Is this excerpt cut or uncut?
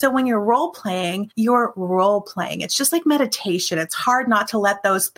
cut